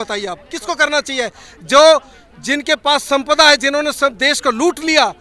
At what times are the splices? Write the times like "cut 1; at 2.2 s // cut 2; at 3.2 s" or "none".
none